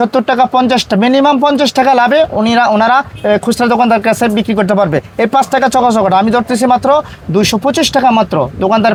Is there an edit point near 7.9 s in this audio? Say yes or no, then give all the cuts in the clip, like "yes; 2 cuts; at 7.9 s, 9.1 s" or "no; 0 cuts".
no; 0 cuts